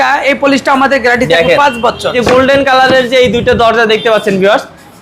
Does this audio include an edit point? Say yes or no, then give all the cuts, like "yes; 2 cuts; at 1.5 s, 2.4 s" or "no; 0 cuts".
yes; 1 cut; at 2.2 s